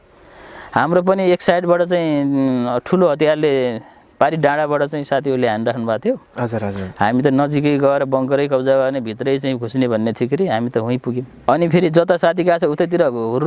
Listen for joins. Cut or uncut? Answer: cut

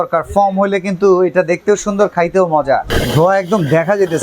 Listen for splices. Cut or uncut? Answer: cut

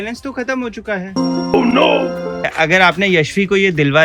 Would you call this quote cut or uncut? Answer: cut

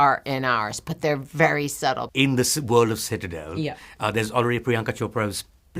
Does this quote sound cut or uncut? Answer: cut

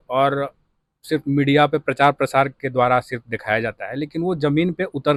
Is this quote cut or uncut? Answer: uncut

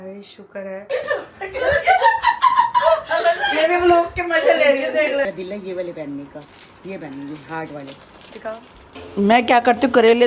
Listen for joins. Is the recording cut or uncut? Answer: cut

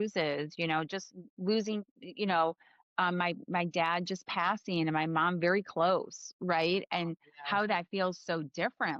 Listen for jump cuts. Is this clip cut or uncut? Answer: uncut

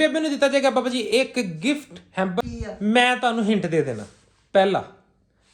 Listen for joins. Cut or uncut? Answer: cut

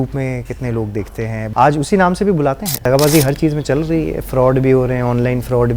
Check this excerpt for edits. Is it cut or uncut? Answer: cut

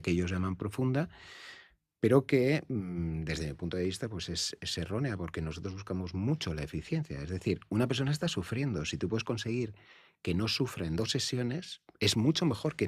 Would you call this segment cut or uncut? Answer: uncut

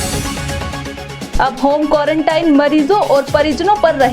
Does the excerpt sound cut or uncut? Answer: cut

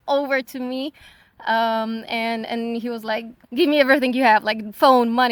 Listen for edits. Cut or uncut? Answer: uncut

